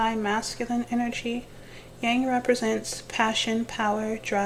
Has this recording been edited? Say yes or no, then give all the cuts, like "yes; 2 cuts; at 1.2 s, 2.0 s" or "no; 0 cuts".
no; 0 cuts